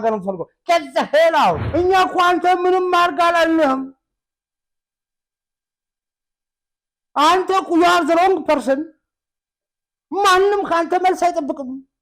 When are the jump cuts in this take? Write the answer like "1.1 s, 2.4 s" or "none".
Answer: 1.6 s